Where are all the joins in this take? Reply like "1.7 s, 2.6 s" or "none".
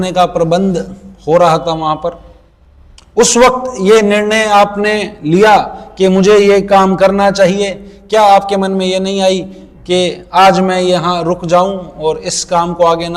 none